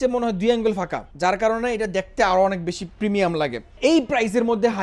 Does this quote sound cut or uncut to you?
cut